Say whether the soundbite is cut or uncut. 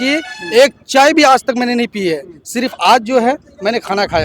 uncut